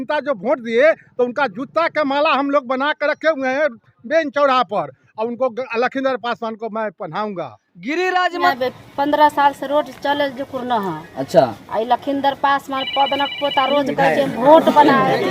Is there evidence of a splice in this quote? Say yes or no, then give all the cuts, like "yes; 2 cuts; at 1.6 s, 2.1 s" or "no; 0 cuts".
yes; 1 cut; at 8.5 s